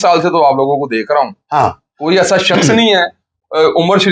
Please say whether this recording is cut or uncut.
uncut